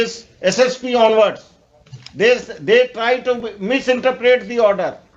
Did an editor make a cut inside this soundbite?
no; 0 cuts

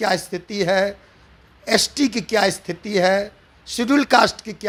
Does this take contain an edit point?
no; 0 cuts

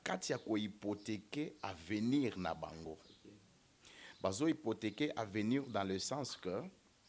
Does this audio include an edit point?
no; 0 cuts

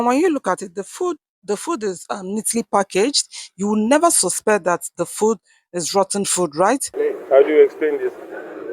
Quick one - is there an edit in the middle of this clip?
yes; 1 cut; at 6.9 s

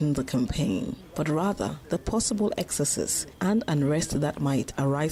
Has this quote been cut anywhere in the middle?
no; 0 cuts

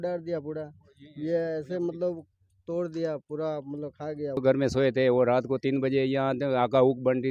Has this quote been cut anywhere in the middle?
yes; 1 cut; at 4.4 s

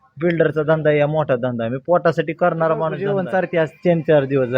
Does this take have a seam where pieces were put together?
yes; 1 cut; at 3.0 s

